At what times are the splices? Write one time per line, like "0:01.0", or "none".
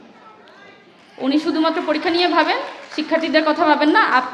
none